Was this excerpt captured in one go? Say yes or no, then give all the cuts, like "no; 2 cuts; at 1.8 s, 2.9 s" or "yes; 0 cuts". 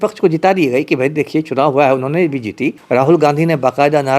no; 1 cut; at 2.8 s